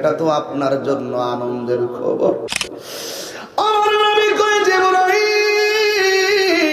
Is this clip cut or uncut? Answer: cut